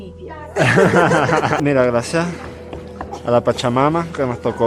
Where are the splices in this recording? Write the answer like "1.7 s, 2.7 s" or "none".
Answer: 1.6 s